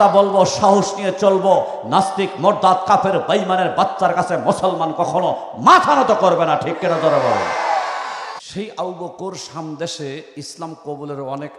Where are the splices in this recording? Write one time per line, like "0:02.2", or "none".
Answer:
0:08.4